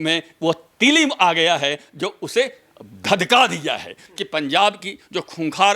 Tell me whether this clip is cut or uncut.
cut